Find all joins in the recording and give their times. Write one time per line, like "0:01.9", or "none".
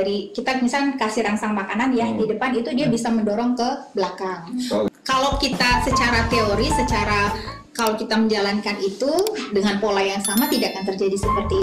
0:04.9